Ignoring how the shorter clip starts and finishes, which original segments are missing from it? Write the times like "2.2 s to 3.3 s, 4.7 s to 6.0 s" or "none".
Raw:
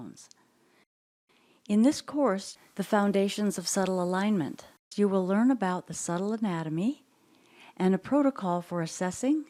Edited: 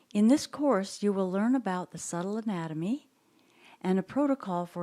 2.5 s to 4.9 s